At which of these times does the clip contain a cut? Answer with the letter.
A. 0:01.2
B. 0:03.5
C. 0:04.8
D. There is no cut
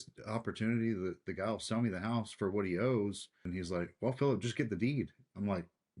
B